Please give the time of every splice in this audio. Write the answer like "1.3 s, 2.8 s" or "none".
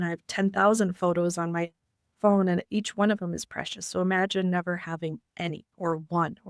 none